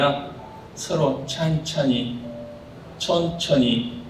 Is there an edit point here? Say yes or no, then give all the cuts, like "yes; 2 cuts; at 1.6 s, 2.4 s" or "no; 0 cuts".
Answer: no; 0 cuts